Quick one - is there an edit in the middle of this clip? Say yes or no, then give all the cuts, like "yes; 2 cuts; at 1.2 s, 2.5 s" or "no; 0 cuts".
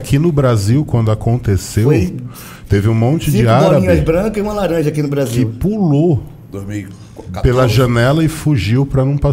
no; 0 cuts